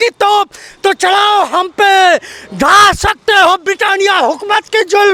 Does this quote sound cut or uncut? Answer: uncut